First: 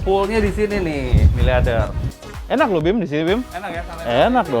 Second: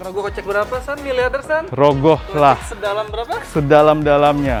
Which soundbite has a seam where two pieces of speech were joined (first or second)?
first